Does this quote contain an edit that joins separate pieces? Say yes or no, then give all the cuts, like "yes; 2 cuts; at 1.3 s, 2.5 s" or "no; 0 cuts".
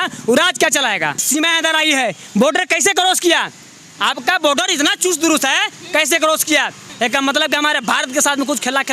yes; 2 cuts; at 1.2 s, 6.8 s